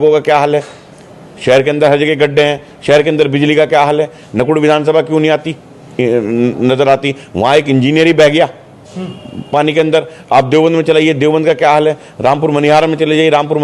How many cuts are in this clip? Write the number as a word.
zero